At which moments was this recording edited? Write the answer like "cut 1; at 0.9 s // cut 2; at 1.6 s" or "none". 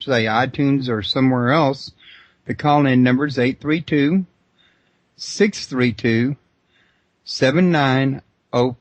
cut 1; at 1.9 s